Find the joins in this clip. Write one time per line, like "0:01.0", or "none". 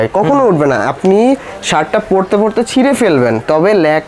none